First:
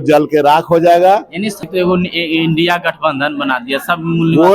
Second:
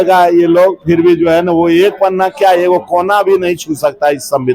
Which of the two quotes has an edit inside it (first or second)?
first